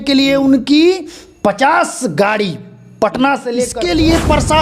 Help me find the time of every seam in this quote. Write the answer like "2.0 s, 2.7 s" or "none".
3.7 s